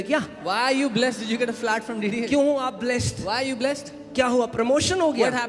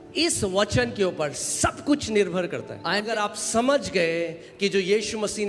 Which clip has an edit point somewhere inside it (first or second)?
second